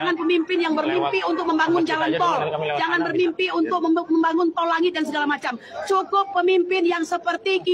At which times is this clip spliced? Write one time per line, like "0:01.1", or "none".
none